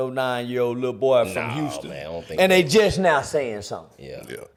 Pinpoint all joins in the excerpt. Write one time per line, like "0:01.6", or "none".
none